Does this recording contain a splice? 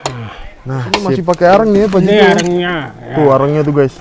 yes; 1 cut; at 1.1 s

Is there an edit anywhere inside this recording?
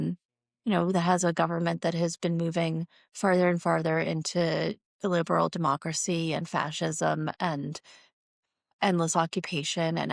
no; 0 cuts

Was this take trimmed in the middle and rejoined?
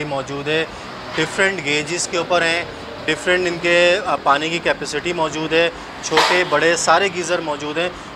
no; 0 cuts

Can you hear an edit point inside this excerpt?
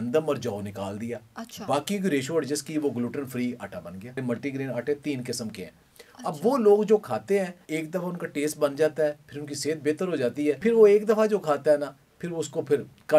yes; 3 cuts; at 4.2 s, 7.6 s, 10.6 s

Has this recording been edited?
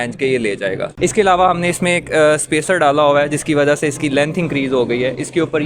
yes; 1 cut; at 0.9 s

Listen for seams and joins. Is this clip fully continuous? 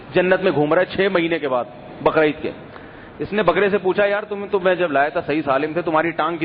no; 1 cut; at 4.3 s

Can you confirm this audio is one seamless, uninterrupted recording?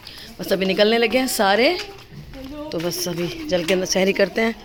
yes; 0 cuts

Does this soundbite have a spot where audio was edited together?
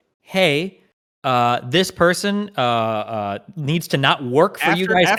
no; 0 cuts

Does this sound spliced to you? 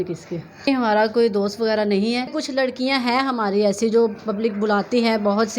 yes; 2 cuts; at 0.7 s, 2.3 s

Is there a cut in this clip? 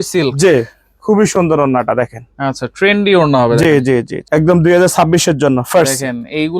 yes; 1 cut; at 4.2 s

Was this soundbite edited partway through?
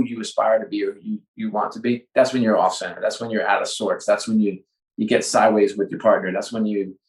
no; 0 cuts

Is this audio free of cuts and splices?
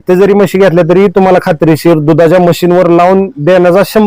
yes; 0 cuts

